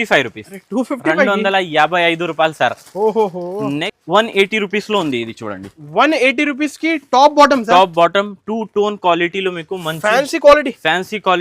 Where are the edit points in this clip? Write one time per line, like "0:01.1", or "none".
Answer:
0:03.9